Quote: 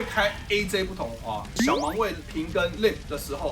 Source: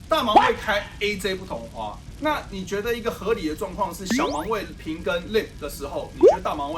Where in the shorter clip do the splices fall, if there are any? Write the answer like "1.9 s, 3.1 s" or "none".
1.5 s